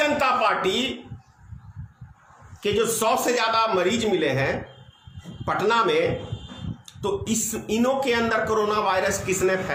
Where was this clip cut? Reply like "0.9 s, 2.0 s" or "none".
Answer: none